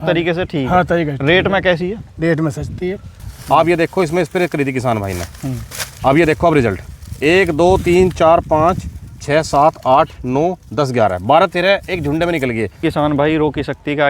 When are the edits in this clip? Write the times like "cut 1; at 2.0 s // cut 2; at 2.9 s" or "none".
cut 1; at 3.1 s // cut 2; at 12.9 s